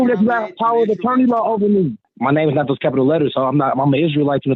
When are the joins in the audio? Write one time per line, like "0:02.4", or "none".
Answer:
0:02.1